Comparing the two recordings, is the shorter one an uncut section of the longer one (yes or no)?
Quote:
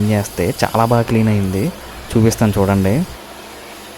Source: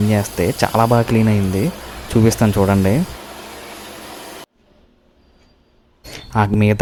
yes